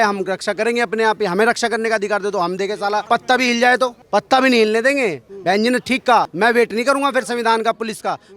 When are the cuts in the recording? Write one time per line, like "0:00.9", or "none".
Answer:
0:03.0
0:04.0
0:06.3